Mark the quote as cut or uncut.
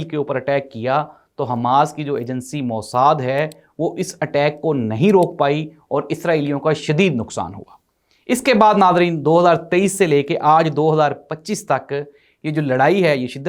uncut